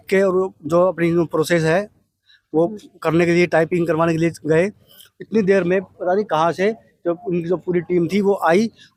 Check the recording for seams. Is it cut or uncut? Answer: uncut